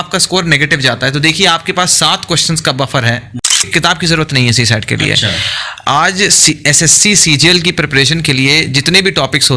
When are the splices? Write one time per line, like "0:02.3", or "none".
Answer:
0:03.6